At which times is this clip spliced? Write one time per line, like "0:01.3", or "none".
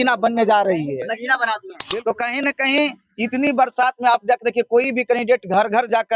0:01.7